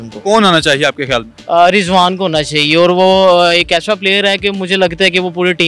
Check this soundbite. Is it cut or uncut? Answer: uncut